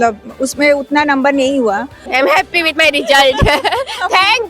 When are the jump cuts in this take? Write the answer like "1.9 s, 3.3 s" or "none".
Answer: 2.0 s